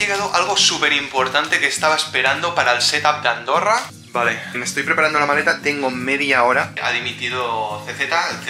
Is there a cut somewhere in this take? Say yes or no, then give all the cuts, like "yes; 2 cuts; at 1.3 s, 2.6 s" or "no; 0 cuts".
yes; 2 cuts; at 4.0 s, 6.7 s